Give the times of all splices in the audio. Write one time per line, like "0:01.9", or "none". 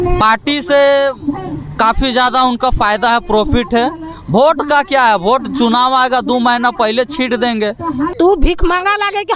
0:08.1